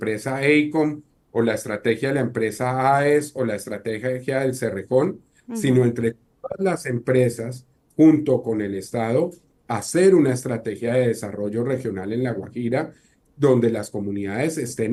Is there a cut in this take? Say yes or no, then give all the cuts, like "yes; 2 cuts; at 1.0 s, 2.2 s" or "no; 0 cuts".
no; 0 cuts